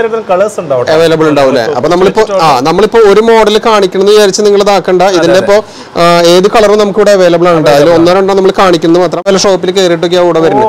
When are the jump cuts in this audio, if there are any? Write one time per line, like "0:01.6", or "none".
0:09.3